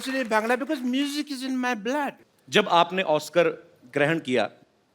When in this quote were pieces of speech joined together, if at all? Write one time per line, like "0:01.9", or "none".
0:02.3